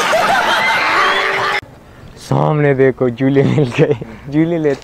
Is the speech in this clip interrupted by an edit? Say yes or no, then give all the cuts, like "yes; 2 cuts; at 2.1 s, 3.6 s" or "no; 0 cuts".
yes; 1 cut; at 1.7 s